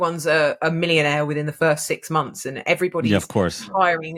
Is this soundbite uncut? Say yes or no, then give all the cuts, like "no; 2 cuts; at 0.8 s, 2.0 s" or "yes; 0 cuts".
yes; 0 cuts